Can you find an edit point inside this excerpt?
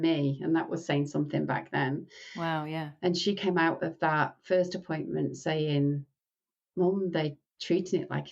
no; 0 cuts

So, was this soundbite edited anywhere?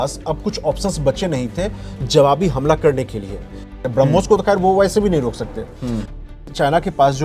yes; 2 cuts; at 3.7 s, 6.2 s

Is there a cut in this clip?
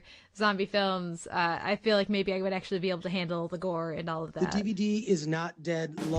yes; 1 cut; at 4.3 s

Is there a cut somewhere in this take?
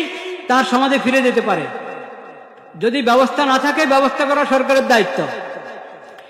no; 0 cuts

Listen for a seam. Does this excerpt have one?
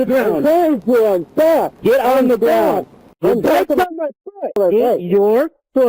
yes; 2 cuts; at 1.7 s, 4.6 s

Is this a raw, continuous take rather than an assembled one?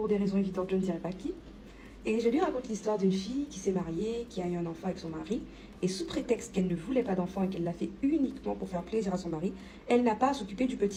yes; 0 cuts

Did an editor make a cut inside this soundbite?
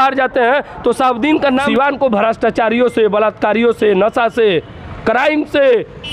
yes; 1 cut; at 1.7 s

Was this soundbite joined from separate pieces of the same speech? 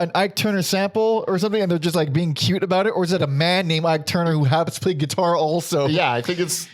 no; 0 cuts

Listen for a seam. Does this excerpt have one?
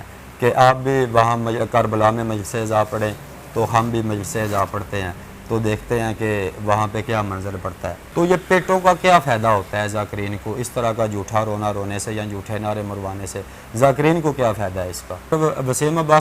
yes; 2 cuts; at 7.9 s, 15.3 s

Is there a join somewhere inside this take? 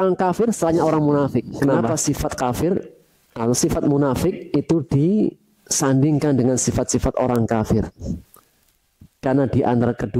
yes; 1 cut; at 1.6 s

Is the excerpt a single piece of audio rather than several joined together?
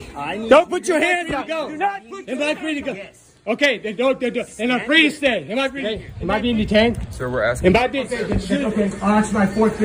no; 3 cuts; at 2.1 s, 6.1 s, 8.3 s

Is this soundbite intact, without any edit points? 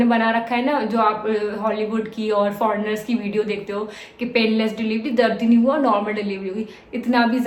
yes; 0 cuts

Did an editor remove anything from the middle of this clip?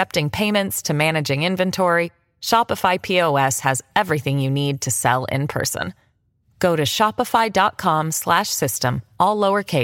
no; 0 cuts

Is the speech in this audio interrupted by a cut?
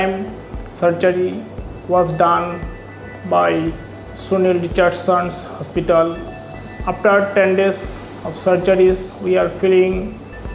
no; 0 cuts

